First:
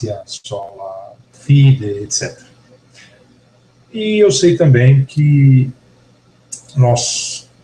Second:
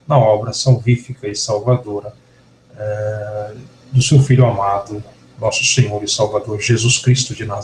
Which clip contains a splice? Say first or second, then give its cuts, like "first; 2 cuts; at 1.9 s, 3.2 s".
second; 1 cut; at 0.9 s